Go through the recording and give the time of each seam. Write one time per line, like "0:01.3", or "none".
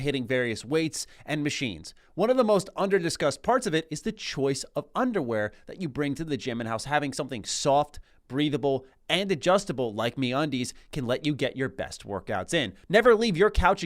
0:12.8